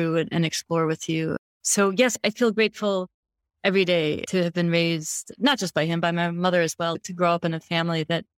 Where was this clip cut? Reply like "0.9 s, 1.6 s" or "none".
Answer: 1.5 s